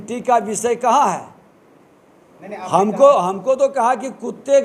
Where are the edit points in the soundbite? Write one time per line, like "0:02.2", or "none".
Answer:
none